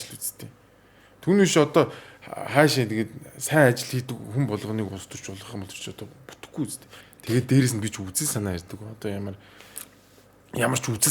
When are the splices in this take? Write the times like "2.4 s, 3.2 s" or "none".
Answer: 6.9 s